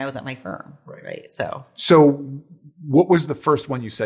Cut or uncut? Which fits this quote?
cut